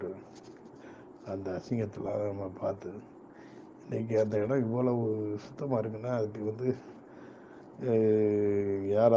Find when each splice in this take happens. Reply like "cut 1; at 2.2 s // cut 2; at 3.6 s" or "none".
none

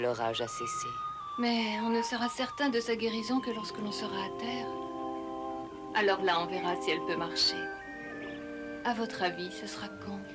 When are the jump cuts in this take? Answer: cut 1; at 8.4 s

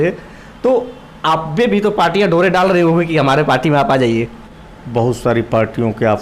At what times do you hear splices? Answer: cut 1; at 4.4 s

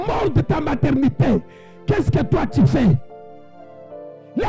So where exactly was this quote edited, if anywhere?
none

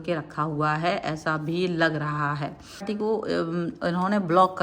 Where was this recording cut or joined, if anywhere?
cut 1; at 2.8 s

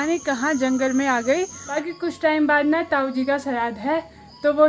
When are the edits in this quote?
cut 1; at 1.8 s

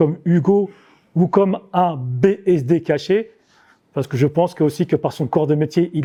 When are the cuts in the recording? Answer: none

